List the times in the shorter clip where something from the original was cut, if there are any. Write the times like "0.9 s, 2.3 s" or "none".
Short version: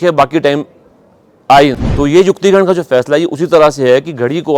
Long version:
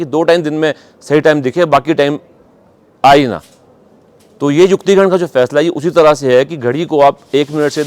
1.8 s